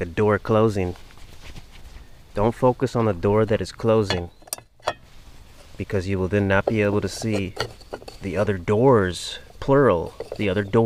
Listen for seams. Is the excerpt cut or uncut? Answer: uncut